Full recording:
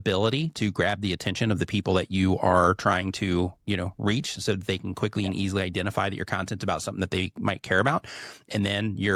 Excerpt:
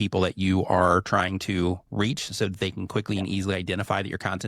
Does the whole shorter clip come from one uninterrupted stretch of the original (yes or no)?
no